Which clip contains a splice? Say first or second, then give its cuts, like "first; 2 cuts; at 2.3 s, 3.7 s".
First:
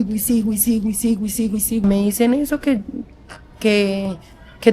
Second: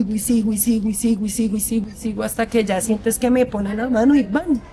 first; 1 cut; at 1.8 s